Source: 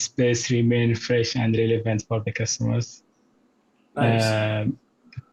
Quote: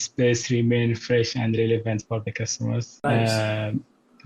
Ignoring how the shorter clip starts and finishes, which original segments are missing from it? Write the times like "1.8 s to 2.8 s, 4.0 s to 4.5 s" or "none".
2.9 s to 3.8 s